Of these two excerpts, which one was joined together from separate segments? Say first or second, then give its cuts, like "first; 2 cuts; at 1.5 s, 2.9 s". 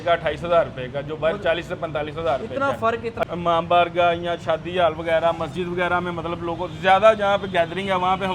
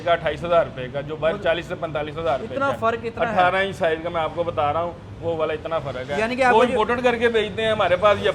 first; 1 cut; at 3.3 s